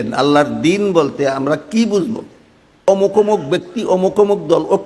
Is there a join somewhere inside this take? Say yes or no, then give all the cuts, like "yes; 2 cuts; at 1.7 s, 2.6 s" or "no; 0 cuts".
yes; 1 cut; at 2.8 s